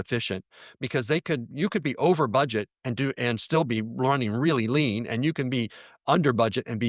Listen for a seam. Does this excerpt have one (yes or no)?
no